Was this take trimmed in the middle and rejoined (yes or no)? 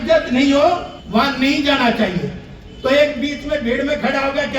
yes